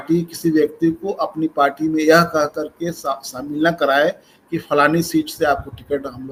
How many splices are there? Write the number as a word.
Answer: zero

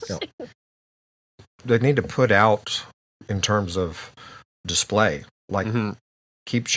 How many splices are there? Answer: one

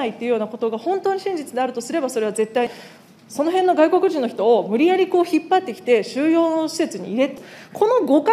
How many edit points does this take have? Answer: two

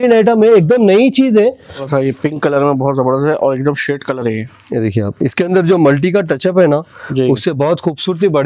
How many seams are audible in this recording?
one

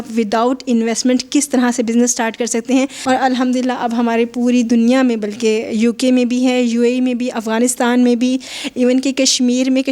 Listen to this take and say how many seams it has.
one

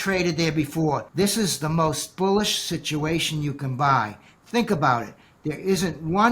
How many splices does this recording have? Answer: one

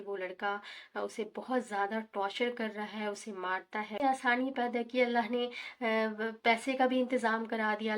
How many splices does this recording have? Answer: one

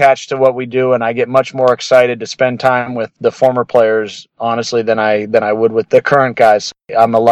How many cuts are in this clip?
zero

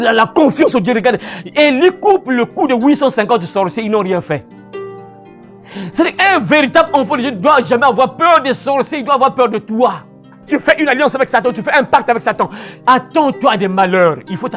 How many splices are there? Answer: one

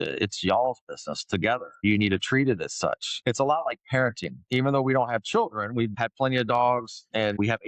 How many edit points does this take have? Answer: one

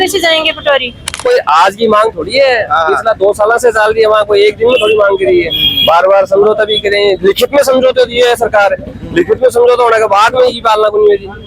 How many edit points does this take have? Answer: one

